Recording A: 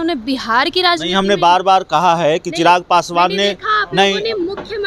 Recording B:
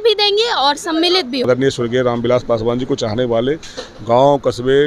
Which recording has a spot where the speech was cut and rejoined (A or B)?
B